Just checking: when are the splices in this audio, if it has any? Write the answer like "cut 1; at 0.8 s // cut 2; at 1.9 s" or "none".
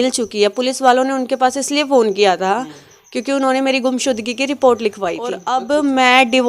cut 1; at 5.5 s